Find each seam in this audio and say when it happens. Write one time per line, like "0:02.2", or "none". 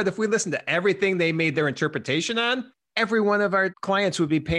0:02.8
0:03.8